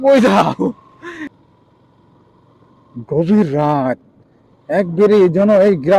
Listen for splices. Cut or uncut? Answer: cut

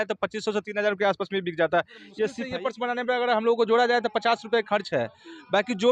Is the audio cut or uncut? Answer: cut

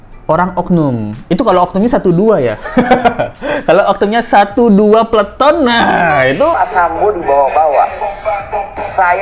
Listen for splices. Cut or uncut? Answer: cut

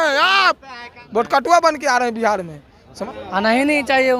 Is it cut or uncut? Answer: cut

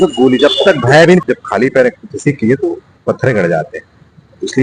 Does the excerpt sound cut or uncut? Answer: cut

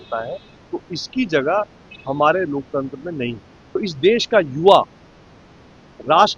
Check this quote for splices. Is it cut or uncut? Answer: cut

